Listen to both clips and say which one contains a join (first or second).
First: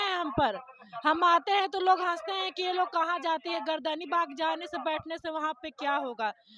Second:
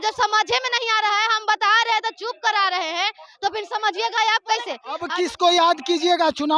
second